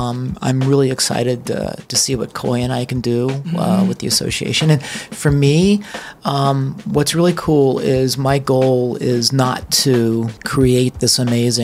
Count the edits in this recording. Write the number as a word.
one